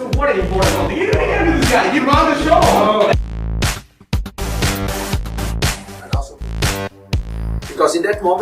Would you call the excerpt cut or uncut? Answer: uncut